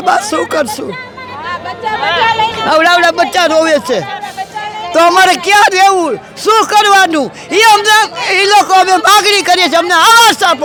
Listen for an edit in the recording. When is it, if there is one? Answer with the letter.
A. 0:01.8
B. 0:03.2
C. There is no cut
C